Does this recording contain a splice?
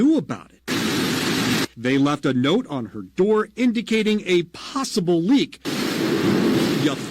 yes; 1 cut; at 5.6 s

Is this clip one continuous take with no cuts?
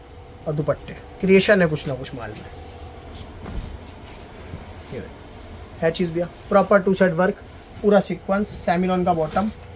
yes; 0 cuts

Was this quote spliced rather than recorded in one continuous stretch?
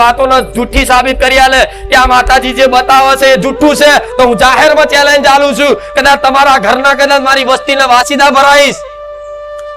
yes; 1 cut; at 8.8 s

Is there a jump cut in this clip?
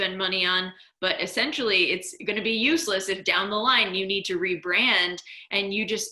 no; 0 cuts

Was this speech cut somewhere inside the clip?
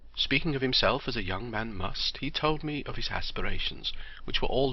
yes; 1 cut; at 2.4 s

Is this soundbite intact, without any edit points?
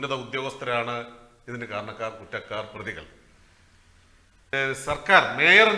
no; 1 cut; at 4.5 s

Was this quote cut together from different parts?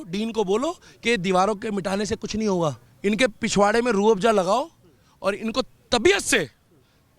yes; 1 cut; at 2.9 s

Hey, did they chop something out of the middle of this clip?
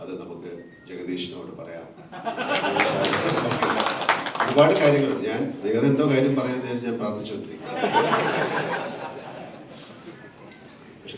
no; 0 cuts

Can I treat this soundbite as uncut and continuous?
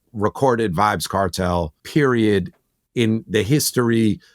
no; 1 cut; at 1.8 s

